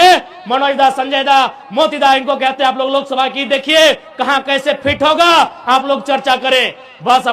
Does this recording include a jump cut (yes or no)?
no